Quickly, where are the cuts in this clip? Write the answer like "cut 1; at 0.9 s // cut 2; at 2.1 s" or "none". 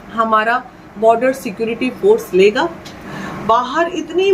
cut 1; at 3.0 s

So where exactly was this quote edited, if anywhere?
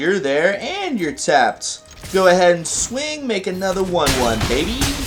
none

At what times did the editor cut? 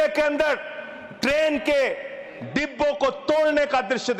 none

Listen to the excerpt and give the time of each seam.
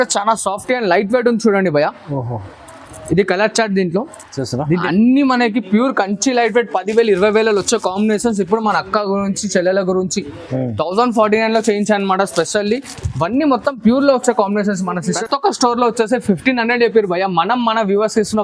cut 1; at 4.8 s // cut 2; at 15.2 s

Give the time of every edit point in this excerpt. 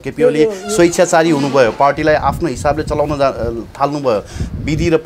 none

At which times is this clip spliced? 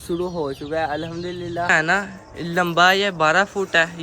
cut 1; at 1.7 s

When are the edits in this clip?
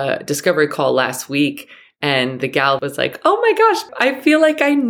cut 1; at 2.8 s // cut 2; at 3.9 s

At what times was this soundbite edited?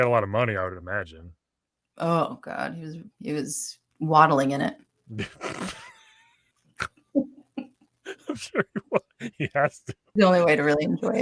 cut 1; at 10.1 s

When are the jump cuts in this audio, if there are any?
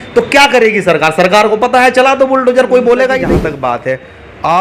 cut 1; at 3.3 s

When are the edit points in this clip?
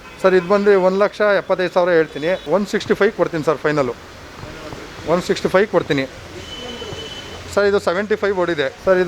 none

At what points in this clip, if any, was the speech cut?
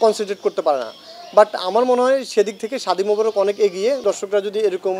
cut 1; at 4.0 s

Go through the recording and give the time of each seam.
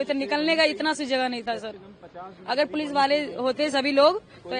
none

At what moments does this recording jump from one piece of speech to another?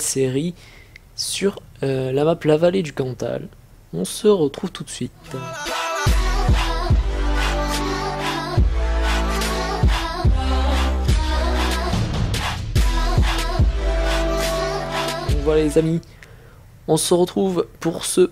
none

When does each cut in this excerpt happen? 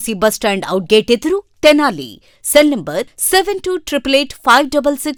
none

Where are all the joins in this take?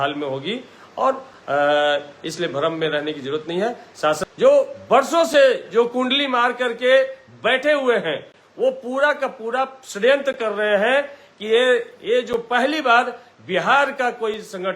cut 1; at 4.2 s

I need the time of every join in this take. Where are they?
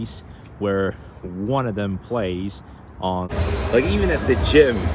cut 1; at 3.3 s

